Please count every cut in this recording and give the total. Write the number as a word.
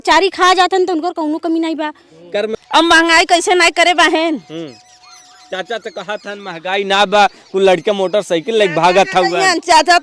one